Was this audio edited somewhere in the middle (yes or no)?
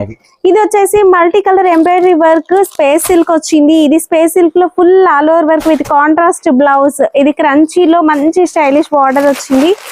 no